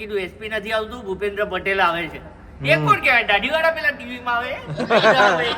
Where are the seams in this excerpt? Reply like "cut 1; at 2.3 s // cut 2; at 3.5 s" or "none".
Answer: none